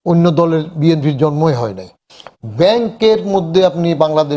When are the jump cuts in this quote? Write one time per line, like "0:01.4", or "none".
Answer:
0:01.9